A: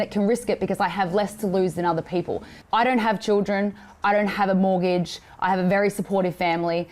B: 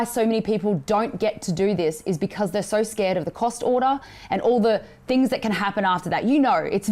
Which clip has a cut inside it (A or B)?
A